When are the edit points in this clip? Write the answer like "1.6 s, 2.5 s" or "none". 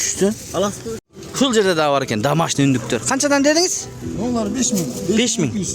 1.0 s